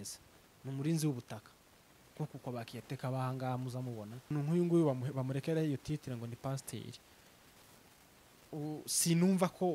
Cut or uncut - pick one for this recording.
cut